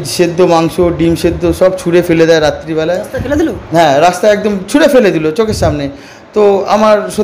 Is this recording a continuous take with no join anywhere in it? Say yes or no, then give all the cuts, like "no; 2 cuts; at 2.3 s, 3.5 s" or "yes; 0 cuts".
yes; 0 cuts